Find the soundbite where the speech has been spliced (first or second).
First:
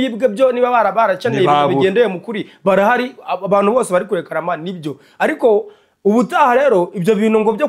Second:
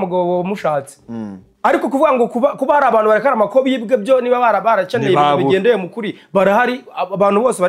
second